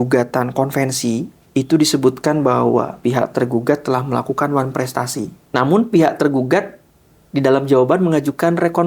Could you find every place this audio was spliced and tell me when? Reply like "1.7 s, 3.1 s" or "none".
1.3 s, 2.9 s, 5.4 s